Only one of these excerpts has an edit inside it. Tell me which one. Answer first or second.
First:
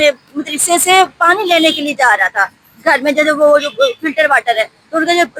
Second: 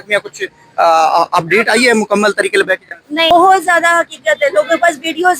second